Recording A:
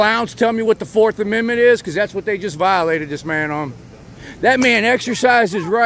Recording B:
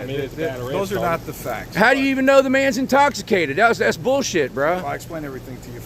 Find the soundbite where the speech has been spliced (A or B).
A